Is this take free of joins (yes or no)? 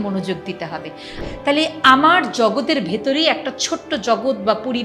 no